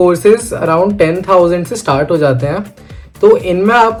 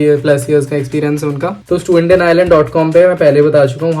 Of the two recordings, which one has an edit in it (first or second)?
second